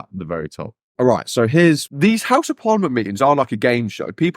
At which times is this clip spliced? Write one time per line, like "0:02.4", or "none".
0:01.9